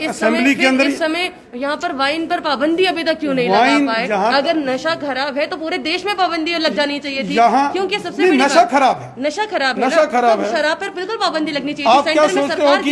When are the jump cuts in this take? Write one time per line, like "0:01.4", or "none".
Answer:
none